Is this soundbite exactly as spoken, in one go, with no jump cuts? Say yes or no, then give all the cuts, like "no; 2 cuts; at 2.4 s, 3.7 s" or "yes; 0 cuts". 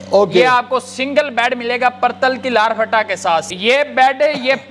no; 1 cut; at 3.5 s